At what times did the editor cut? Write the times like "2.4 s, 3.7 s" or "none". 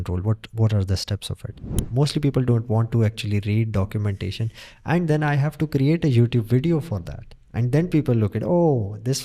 1.8 s